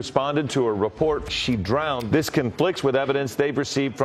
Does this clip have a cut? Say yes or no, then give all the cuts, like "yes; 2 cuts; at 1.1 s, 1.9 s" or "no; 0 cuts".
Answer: no; 0 cuts